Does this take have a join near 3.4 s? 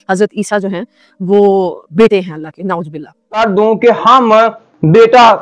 yes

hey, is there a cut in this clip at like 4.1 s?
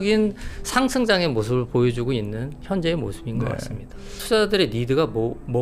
yes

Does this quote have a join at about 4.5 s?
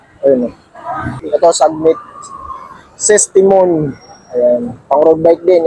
no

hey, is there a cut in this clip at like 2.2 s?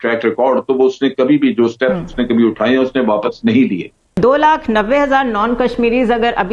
no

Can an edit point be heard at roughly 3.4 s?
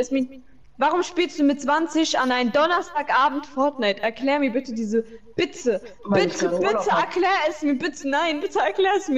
no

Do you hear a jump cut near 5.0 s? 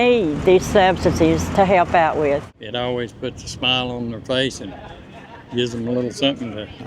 no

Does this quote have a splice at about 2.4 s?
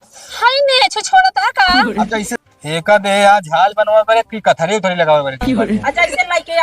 yes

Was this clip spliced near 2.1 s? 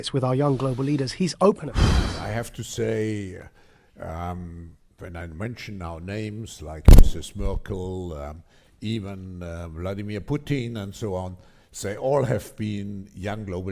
yes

